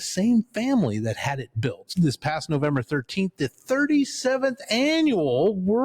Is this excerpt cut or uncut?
cut